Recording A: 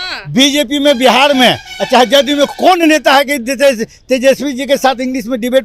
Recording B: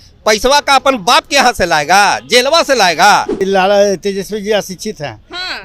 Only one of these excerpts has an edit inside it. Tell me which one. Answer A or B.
B